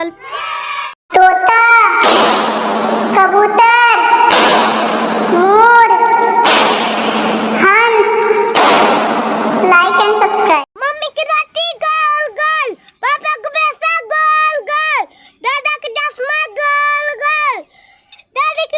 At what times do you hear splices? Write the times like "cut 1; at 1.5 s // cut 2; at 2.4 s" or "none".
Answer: cut 1; at 1.0 s